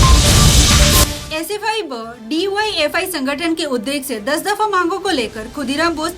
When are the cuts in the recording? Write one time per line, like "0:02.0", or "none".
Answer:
0:01.0